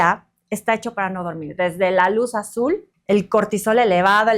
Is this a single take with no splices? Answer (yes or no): no